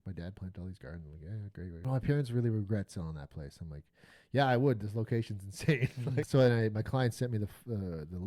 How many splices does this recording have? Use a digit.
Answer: 2